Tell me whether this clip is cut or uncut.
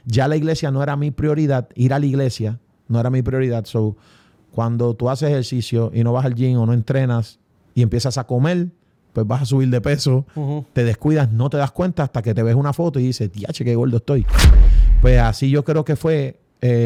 uncut